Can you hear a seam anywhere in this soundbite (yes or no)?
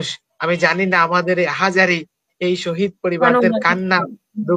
no